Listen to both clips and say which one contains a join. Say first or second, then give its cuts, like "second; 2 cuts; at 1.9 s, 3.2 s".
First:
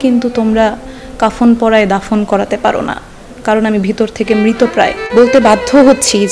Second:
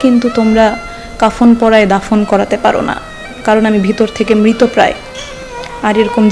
first; 1 cut; at 5.0 s